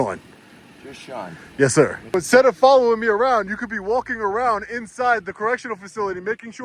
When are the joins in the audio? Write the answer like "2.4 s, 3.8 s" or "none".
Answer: 2.1 s